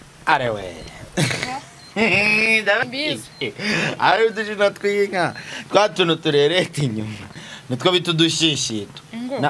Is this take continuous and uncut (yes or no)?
no